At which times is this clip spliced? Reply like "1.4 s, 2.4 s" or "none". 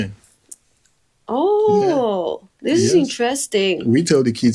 none